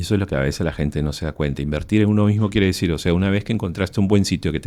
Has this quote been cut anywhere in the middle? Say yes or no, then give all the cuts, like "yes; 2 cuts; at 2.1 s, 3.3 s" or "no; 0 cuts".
no; 0 cuts